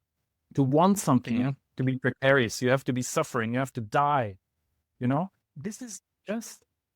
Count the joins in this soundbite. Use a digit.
1